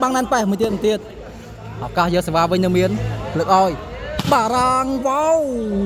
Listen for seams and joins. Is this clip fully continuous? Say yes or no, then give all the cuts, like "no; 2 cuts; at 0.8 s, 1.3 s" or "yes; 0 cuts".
yes; 0 cuts